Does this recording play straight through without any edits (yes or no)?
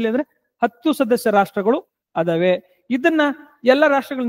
yes